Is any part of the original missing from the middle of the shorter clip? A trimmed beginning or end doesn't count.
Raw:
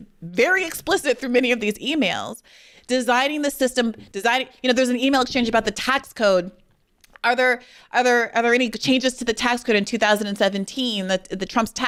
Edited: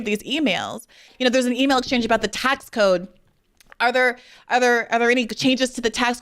yes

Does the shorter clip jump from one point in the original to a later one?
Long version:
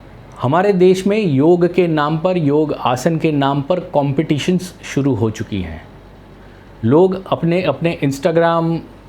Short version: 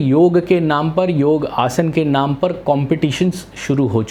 no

